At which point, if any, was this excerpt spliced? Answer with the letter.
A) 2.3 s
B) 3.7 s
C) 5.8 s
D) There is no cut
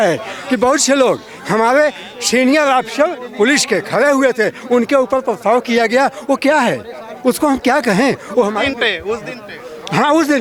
D